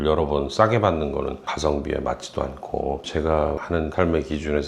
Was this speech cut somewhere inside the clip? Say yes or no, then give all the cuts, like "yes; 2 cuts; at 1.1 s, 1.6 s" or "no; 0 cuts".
yes; 1 cut; at 1.4 s